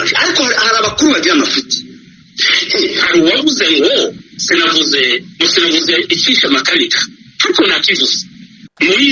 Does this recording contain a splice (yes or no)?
yes